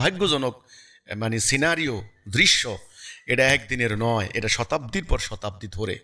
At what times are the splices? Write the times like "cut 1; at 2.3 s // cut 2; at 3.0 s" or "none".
none